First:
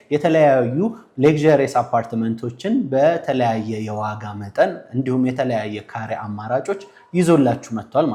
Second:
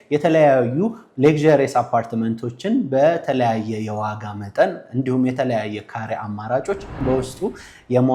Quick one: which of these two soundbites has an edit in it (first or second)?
second